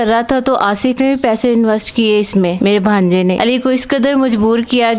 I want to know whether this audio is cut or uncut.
cut